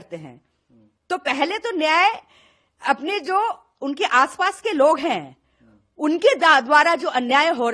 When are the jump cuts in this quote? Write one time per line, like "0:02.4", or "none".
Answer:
none